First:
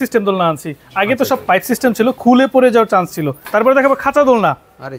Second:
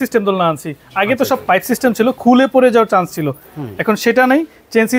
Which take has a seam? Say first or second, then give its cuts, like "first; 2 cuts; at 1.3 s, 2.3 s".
first; 1 cut; at 3.4 s